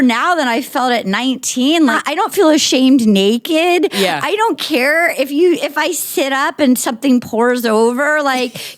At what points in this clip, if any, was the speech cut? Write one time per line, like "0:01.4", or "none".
0:02.0